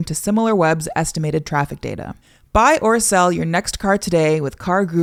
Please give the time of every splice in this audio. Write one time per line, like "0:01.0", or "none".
none